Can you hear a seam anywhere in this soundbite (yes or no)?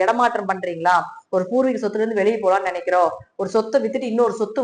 no